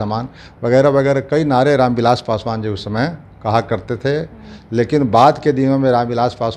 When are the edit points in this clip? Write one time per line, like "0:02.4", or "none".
none

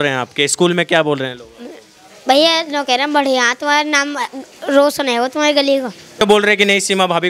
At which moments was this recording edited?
0:06.2

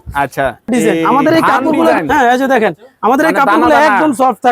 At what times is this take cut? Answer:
0:01.9

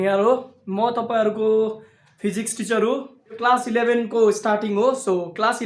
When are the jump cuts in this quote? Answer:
0:03.4

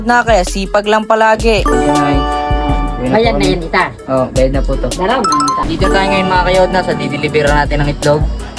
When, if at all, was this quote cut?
0:05.6

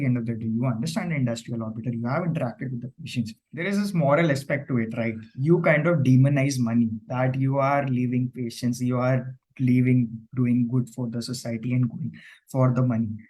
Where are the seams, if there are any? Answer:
0:03.5

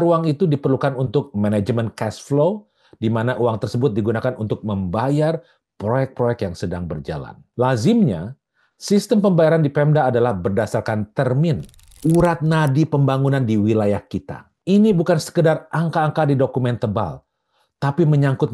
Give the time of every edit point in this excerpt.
0:11.8

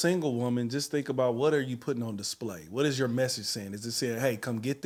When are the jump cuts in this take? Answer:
none

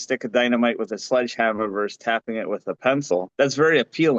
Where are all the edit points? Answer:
0:03.3

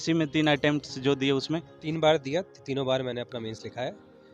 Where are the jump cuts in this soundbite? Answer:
0:01.8

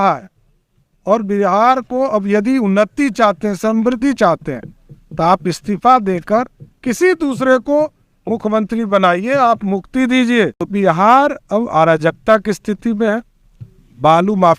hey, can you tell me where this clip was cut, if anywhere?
0:10.6

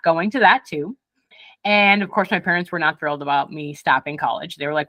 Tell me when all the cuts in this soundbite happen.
none

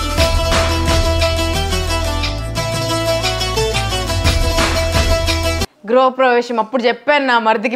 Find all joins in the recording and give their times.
0:05.7

